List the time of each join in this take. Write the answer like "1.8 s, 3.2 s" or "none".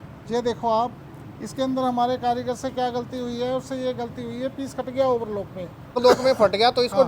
6.0 s